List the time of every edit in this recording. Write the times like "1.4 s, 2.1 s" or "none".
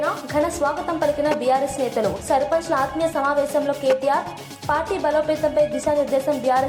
none